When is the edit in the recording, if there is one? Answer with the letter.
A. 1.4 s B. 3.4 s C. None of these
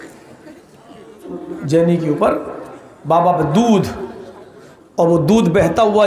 A